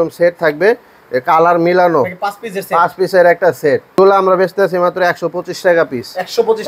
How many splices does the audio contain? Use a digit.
1